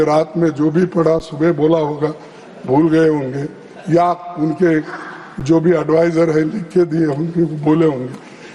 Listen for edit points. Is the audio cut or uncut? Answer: uncut